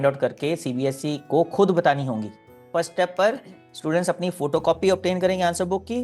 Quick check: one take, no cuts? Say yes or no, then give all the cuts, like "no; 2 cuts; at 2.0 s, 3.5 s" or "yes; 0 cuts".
no; 1 cut; at 2.7 s